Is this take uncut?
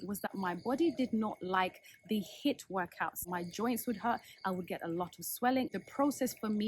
no; 2 cuts; at 3.2 s, 5.7 s

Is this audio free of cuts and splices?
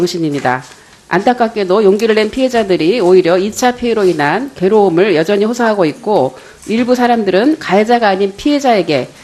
yes; 0 cuts

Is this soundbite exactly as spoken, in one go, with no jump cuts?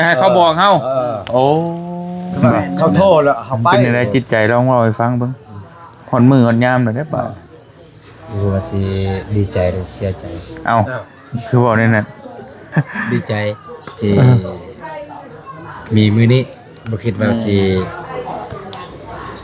no; 2 cuts; at 3.8 s, 12.7 s

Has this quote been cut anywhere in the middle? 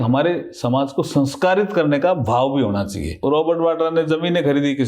yes; 1 cut; at 3.0 s

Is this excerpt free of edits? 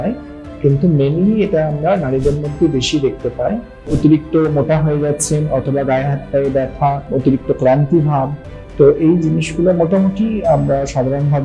no; 2 cuts; at 3.9 s, 7.1 s

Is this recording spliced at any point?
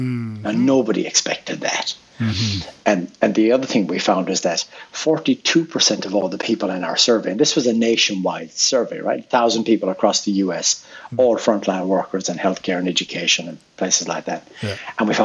no; 0 cuts

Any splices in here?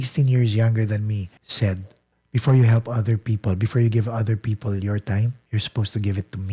yes; 2 cuts; at 1.4 s, 5.4 s

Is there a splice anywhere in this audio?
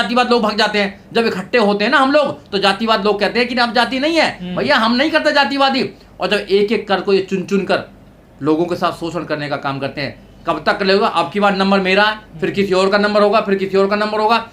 no; 0 cuts

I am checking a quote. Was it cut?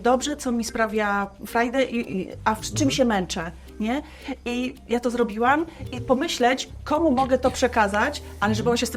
no; 0 cuts

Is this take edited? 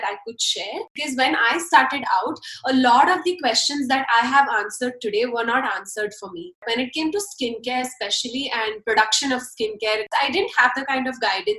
yes; 3 cuts; at 1.0 s, 6.6 s, 10.1 s

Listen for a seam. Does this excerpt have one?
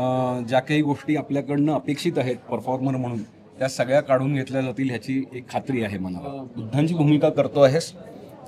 yes; 1 cut; at 6.5 s

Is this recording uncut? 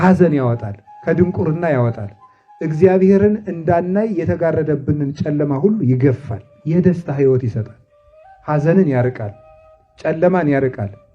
no; 1 cut; at 6.6 s

